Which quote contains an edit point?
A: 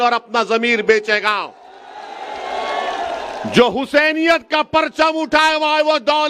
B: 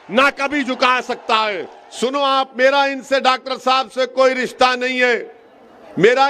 B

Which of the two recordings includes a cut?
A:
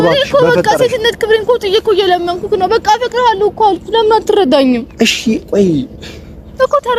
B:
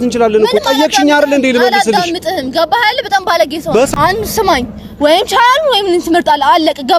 B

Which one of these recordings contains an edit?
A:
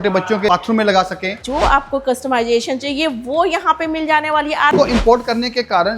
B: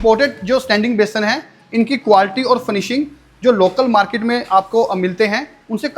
A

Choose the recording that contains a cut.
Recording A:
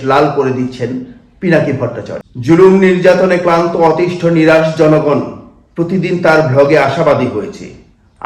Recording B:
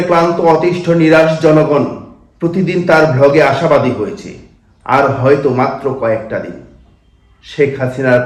A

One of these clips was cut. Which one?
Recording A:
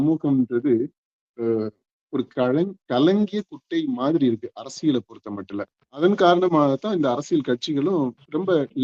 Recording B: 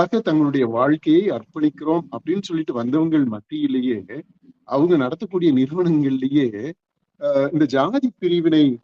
A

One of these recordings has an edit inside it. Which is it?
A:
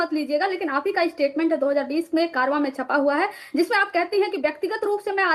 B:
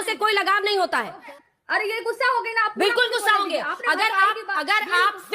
B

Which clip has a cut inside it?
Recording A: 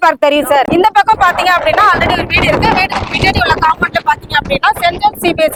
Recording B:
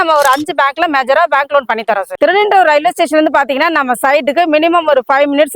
B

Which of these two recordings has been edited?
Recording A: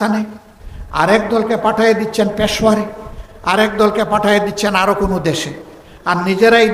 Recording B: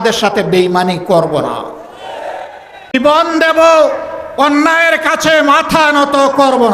B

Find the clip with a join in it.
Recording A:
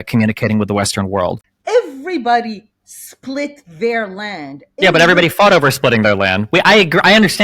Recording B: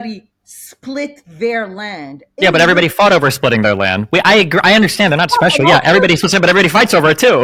A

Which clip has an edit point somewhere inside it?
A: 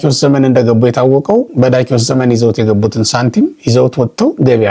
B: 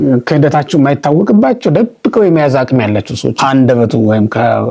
B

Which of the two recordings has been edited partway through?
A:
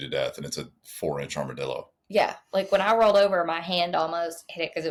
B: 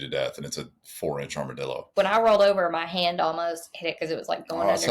B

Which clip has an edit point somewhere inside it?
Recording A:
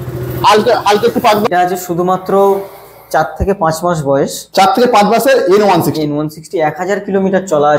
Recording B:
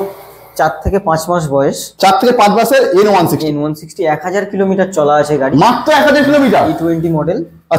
A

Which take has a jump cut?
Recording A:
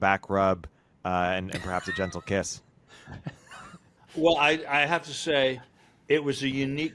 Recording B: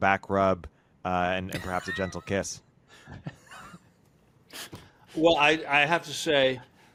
A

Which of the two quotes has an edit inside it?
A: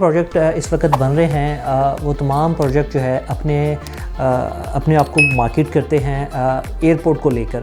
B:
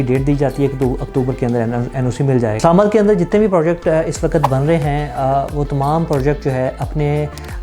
B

